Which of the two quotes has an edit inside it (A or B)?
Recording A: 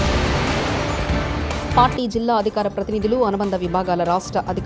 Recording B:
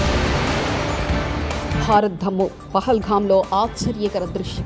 A